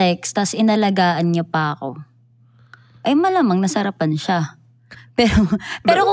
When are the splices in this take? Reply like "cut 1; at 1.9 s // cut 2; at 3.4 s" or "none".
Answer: none